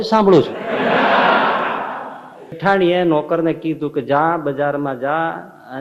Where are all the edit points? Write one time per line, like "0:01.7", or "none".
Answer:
0:02.6